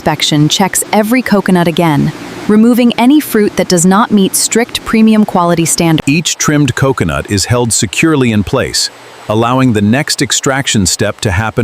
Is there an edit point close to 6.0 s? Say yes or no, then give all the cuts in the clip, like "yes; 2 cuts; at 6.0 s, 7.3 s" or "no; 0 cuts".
yes; 1 cut; at 6.0 s